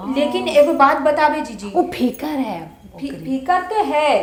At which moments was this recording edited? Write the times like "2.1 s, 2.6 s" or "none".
none